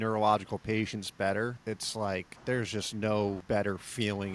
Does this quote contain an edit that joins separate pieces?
yes; 2 cuts; at 2.2 s, 3.4 s

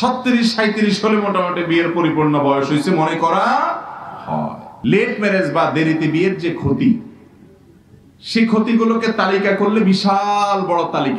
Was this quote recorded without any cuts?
no; 1 cut; at 4.6 s

